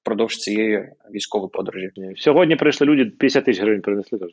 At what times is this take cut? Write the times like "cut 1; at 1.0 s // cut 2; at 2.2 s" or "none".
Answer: cut 1; at 2.0 s